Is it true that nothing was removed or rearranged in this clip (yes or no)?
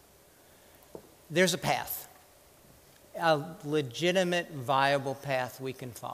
no